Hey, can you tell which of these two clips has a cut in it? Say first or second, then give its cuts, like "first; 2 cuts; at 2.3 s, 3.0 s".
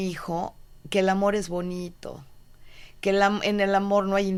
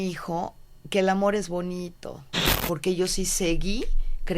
second; 1 cut; at 2.5 s